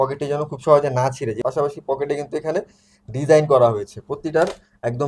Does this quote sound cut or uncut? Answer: cut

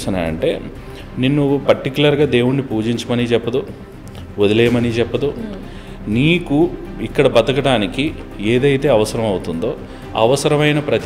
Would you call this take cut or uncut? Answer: uncut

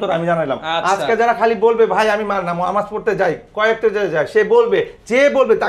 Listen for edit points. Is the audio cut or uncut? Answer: uncut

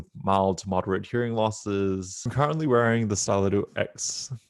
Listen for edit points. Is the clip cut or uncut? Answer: cut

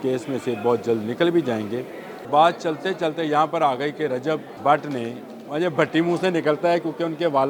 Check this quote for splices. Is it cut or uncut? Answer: cut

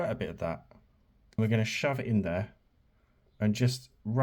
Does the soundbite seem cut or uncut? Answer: cut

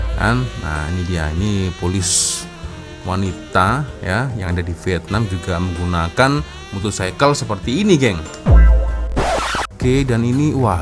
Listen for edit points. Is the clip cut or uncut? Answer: cut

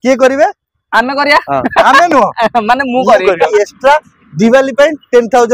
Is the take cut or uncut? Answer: cut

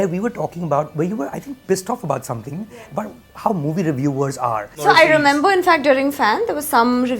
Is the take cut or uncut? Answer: cut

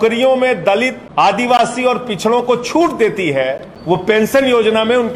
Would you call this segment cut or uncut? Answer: cut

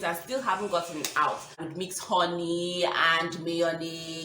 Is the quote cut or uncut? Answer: cut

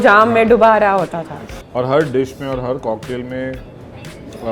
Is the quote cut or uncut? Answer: cut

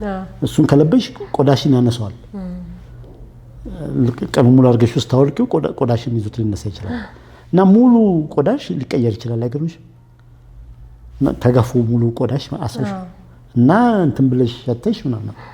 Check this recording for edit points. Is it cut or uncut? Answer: uncut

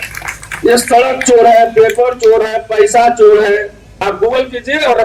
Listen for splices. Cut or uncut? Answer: cut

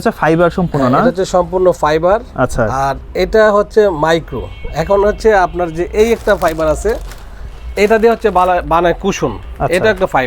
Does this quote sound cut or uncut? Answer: uncut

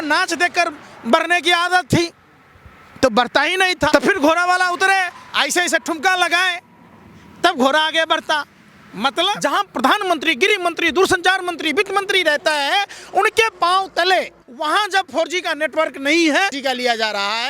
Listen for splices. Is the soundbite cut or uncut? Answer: cut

